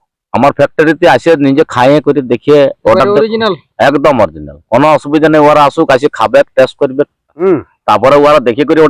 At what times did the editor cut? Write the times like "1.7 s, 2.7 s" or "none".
7.3 s